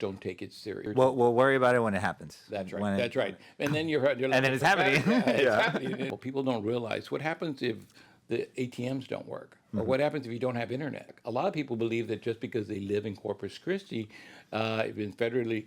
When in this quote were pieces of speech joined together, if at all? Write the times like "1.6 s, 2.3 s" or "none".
0.8 s, 6.1 s, 11.1 s